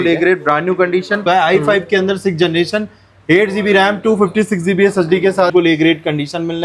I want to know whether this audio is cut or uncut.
cut